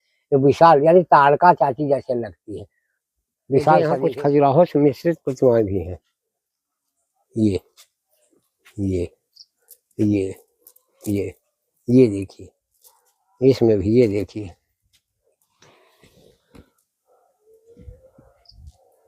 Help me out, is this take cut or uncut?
cut